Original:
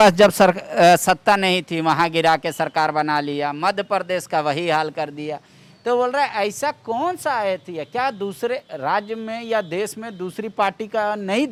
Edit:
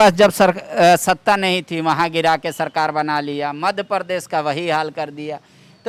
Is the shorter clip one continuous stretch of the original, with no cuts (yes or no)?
yes